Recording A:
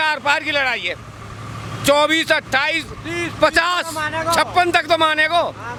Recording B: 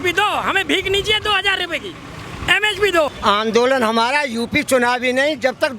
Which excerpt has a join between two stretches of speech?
B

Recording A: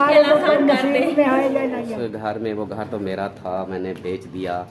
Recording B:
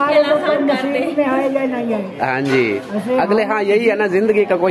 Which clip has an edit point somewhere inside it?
A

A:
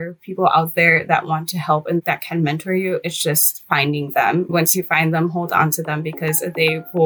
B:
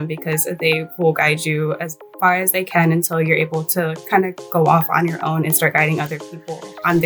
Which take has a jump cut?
A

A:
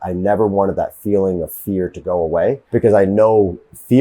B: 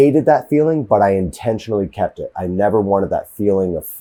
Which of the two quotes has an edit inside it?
A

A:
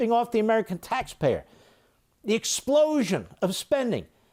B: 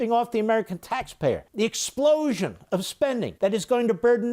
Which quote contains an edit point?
B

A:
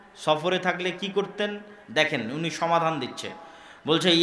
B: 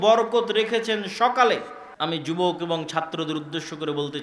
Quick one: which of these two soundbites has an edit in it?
B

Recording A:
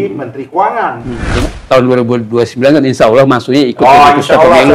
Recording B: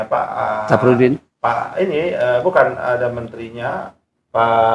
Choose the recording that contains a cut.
A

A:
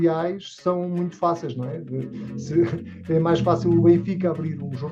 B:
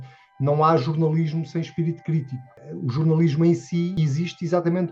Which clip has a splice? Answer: B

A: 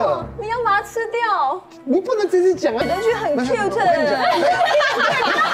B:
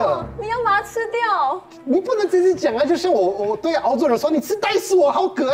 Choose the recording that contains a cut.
A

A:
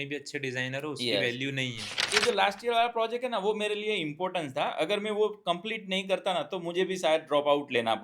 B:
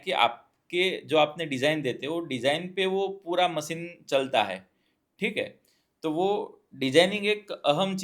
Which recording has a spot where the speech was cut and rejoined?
A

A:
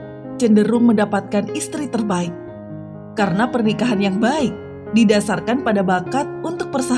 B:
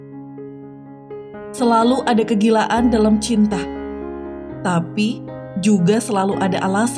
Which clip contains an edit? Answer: B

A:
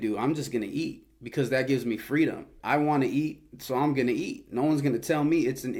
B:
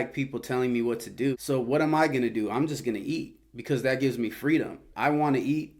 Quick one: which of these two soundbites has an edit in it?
B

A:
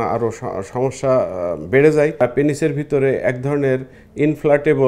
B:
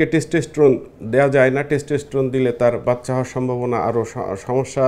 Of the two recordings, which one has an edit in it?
A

